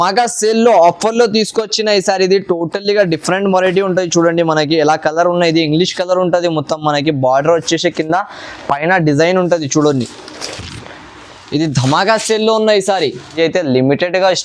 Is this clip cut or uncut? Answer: cut